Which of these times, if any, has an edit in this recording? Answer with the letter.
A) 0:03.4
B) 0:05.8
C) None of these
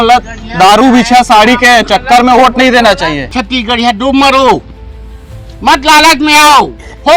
A